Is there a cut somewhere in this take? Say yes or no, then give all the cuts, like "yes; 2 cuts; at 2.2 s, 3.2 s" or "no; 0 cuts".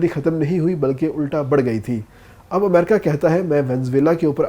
no; 0 cuts